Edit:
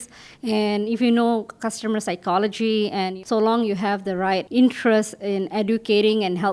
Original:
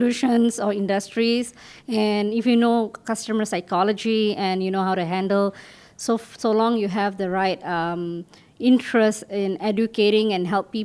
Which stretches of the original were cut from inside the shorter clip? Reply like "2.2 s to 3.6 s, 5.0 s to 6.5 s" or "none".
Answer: 4.6 s to 6.3 s, 7.6 s to 8.5 s